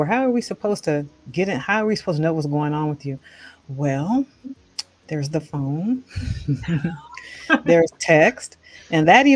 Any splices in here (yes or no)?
no